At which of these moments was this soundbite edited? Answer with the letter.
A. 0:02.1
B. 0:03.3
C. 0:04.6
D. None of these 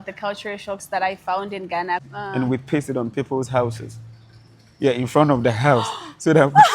A